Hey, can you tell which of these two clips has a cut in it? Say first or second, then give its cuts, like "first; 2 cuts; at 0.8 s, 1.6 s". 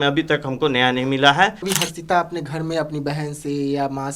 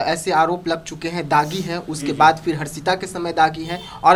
first; 1 cut; at 1.7 s